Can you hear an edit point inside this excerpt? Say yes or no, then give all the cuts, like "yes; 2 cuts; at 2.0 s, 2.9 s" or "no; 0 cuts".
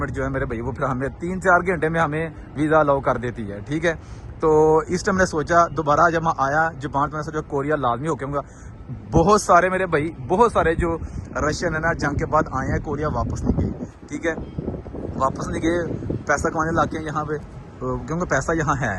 no; 0 cuts